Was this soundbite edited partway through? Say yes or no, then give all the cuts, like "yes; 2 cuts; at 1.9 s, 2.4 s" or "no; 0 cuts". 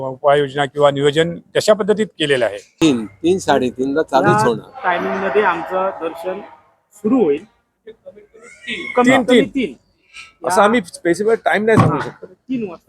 yes; 1 cut; at 2.7 s